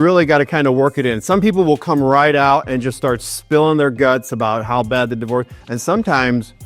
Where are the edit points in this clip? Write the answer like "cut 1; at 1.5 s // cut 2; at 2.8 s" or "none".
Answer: cut 1; at 5.6 s